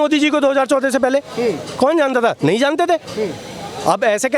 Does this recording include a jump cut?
no; 0 cuts

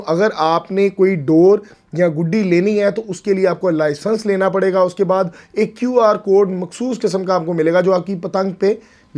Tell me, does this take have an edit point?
no; 0 cuts

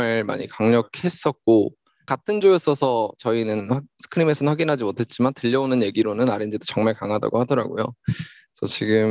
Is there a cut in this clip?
yes; 1 cut; at 2.0 s

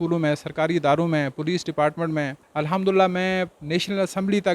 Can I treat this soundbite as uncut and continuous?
no; 2 cuts; at 2.4 s, 3.6 s

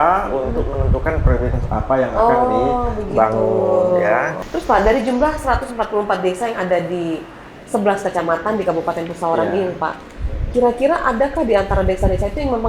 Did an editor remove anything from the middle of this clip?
yes; 1 cut; at 4.3 s

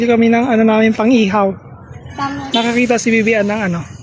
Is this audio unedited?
yes; 0 cuts

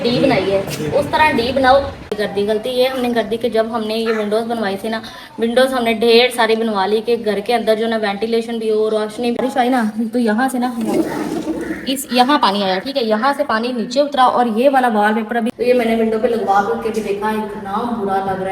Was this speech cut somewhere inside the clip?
yes; 3 cuts; at 2.2 s, 9.3 s, 15.6 s

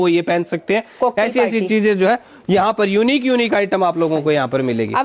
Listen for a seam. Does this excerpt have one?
no; 0 cuts

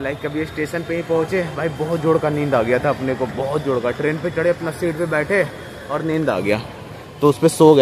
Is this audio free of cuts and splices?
yes; 0 cuts

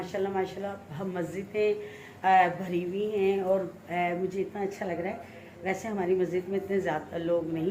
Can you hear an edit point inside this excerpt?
no; 0 cuts

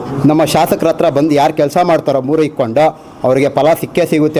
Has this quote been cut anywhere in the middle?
no; 0 cuts

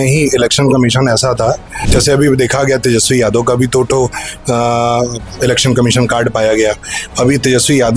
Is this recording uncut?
no; 1 cut; at 1.8 s

